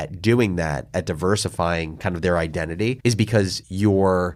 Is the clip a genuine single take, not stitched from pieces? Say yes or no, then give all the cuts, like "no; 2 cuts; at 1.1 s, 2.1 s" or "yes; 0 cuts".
yes; 0 cuts